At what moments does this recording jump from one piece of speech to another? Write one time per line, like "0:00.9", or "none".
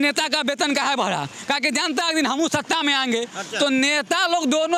none